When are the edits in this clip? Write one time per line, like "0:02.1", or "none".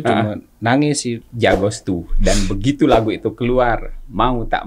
0:01.3

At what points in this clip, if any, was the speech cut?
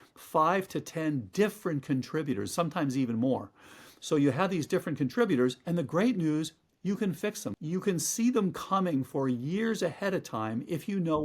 0:07.5

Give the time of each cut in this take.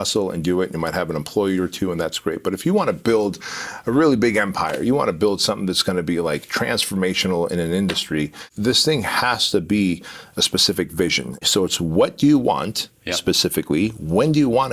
0:08.4
0:11.4

